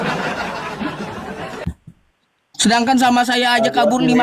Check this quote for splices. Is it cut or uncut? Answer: uncut